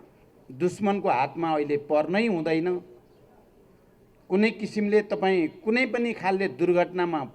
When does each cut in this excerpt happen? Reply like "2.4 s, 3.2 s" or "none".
none